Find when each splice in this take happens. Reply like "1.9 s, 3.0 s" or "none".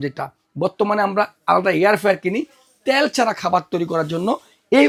none